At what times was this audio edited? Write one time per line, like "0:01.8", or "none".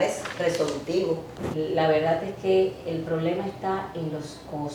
0:01.4